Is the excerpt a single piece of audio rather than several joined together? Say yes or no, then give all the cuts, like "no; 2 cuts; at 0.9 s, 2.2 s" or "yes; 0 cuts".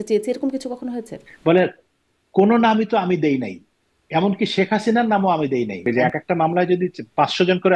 no; 2 cuts; at 1.2 s, 5.8 s